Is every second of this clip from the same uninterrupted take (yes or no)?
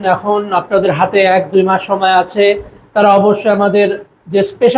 yes